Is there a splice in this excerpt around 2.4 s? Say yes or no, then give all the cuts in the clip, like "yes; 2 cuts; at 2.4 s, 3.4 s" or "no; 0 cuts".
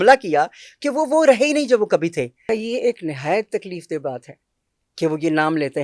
yes; 1 cut; at 2.4 s